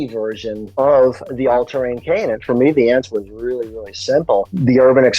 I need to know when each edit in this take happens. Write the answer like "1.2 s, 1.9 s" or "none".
2.4 s

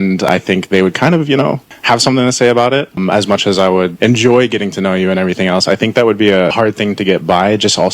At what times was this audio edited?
4.2 s

